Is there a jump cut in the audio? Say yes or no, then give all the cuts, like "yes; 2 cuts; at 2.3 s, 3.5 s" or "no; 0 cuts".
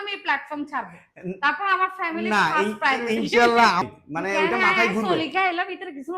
yes; 1 cut; at 3.9 s